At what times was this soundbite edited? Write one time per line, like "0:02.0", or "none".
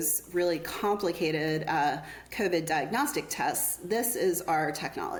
none